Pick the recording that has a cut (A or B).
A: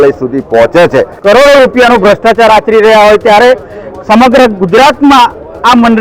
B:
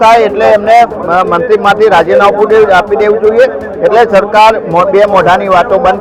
A